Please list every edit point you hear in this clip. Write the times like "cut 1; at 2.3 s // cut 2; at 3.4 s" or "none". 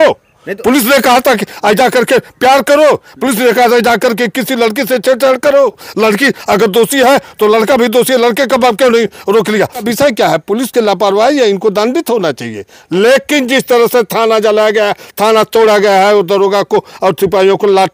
cut 1; at 9.9 s